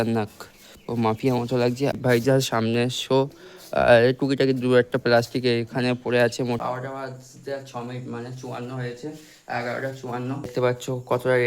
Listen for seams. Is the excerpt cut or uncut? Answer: cut